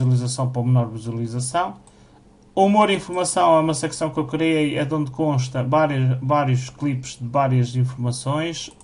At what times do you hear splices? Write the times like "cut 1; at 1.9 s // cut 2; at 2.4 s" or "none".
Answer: cut 1; at 6.2 s